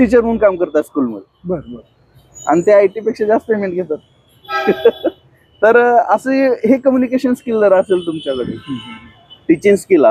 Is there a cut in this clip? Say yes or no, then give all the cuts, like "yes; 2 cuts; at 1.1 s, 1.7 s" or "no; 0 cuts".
no; 0 cuts